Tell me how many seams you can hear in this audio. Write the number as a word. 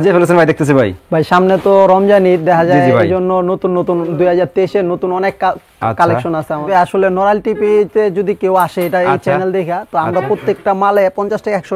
one